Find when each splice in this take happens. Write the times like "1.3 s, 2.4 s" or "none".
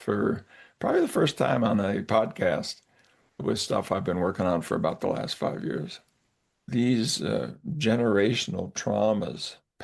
6.6 s